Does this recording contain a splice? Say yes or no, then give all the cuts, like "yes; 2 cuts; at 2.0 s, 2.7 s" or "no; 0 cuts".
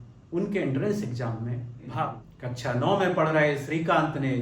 yes; 1 cut; at 2.2 s